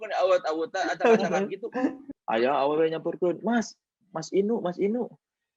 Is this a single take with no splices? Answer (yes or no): no